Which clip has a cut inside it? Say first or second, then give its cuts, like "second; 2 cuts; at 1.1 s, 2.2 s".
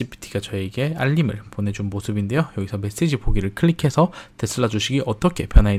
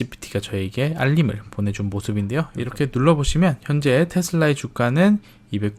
second; 1 cut; at 2.5 s